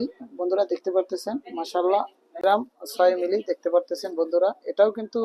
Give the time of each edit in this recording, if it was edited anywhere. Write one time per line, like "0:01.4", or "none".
0:02.4